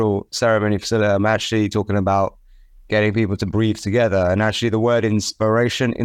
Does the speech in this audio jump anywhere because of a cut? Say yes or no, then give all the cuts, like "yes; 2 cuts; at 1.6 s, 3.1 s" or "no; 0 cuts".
no; 0 cuts